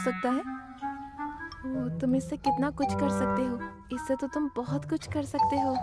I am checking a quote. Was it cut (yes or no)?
yes